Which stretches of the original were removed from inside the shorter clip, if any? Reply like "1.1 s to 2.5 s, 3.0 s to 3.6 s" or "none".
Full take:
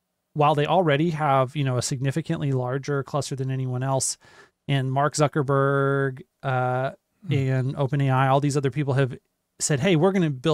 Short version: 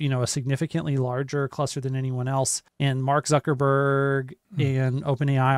4.2 s to 4.5 s, 6.3 s to 7.1 s